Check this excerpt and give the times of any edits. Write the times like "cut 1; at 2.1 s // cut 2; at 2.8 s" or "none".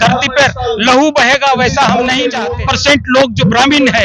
cut 1; at 2.4 s